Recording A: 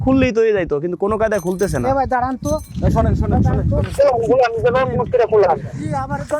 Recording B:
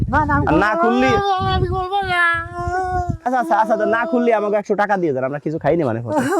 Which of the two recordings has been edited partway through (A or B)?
B